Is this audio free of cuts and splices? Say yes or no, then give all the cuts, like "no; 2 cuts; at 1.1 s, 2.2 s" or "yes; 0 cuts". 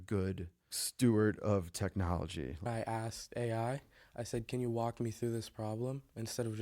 no; 1 cut; at 2.7 s